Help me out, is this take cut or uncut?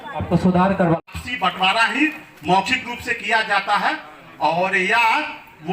cut